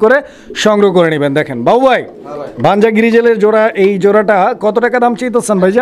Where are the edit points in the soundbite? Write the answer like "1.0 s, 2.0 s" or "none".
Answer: none

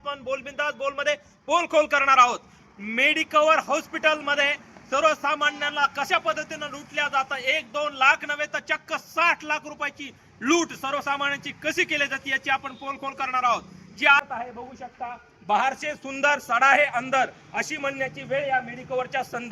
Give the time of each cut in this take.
14.2 s

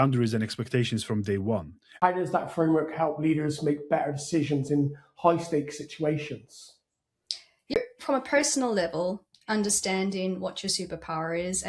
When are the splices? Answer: 1.8 s, 7.8 s

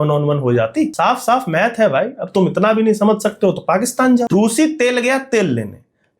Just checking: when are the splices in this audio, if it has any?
0.9 s, 4.3 s

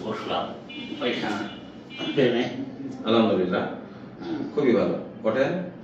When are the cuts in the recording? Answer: none

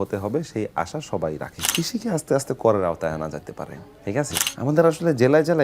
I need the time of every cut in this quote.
1.6 s, 4.4 s

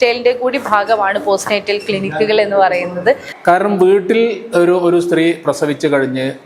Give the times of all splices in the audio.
3.3 s

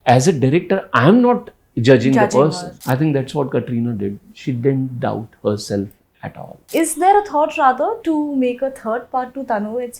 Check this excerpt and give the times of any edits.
2.7 s, 6.6 s

